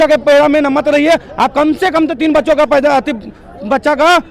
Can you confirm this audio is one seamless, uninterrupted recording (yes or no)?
yes